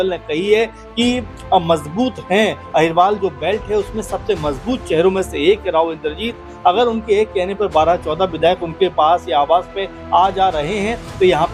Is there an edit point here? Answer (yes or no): no